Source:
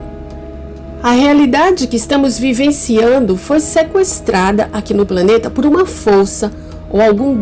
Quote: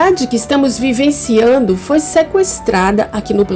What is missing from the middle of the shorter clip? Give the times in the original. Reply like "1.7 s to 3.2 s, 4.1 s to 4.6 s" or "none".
none